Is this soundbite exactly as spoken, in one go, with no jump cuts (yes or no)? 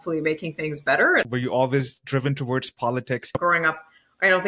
no